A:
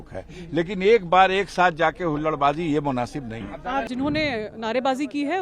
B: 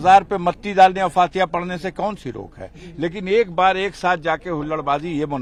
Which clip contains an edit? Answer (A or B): A